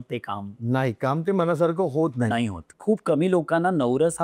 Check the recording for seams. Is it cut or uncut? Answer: cut